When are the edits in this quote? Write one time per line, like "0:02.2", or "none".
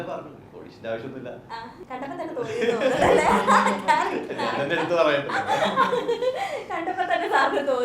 none